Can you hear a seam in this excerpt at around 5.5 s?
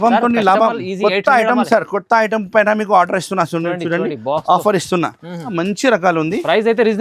yes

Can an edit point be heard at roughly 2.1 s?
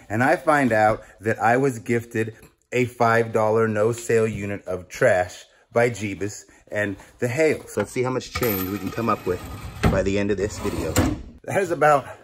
no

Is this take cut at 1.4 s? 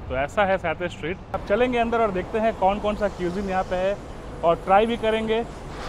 yes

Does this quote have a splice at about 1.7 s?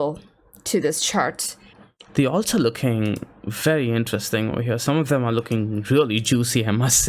yes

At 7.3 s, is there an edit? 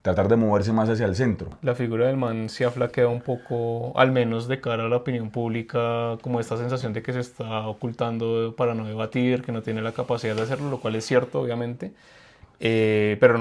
no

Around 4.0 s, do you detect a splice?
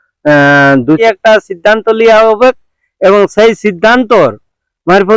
no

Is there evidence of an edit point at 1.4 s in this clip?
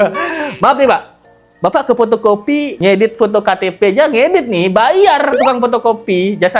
no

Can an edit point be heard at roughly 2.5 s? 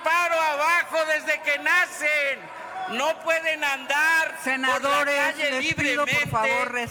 no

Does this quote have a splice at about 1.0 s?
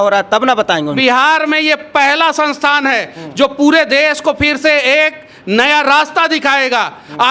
yes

